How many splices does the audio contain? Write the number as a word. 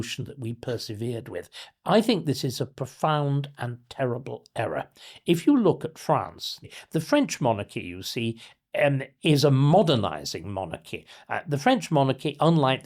one